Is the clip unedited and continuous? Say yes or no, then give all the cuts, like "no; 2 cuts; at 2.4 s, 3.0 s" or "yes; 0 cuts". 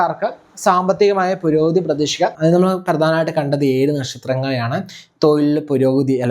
no; 1 cut; at 2.3 s